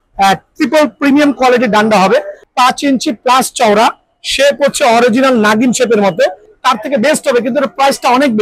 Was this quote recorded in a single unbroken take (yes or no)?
no